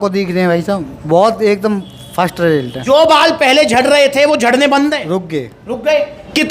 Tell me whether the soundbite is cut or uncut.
cut